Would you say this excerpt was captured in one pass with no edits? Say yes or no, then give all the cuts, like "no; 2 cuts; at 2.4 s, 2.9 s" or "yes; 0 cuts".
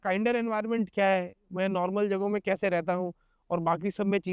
yes; 0 cuts